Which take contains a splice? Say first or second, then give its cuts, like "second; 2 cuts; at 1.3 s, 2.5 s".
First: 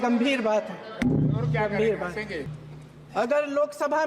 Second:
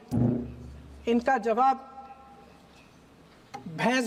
first; 1 cut; at 2.5 s